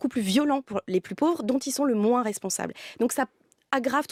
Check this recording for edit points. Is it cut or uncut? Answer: uncut